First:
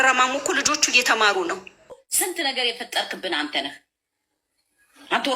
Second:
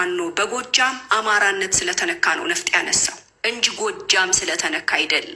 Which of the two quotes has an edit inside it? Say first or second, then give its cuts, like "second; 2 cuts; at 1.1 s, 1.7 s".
first; 1 cut; at 2.1 s